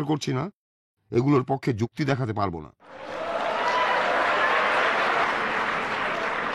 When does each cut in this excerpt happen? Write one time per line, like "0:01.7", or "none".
0:03.1
0:05.2